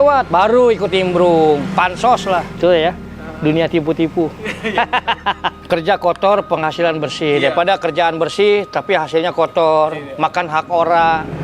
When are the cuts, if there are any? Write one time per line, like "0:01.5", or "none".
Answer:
0:05.6